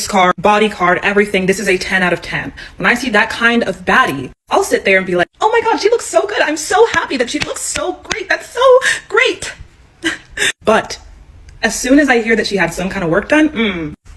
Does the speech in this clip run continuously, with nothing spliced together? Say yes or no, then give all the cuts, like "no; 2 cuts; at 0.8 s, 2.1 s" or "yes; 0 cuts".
yes; 0 cuts